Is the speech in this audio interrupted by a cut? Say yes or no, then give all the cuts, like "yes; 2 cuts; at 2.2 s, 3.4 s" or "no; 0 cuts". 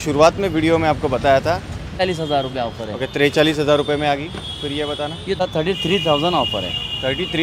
yes; 2 cuts; at 2.0 s, 5.4 s